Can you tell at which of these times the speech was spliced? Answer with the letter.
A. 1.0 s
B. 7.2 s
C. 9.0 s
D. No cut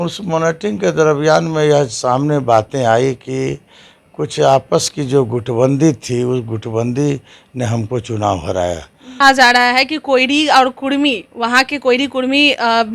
C